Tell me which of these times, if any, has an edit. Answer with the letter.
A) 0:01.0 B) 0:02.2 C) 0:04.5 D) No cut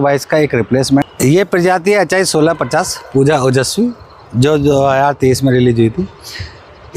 A